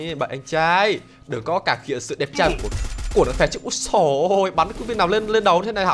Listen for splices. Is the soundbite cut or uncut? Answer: uncut